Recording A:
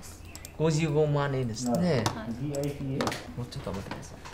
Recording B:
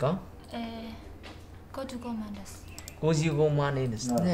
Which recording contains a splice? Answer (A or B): A